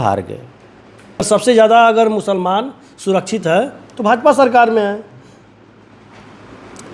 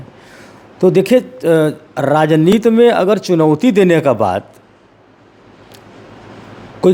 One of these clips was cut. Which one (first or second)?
first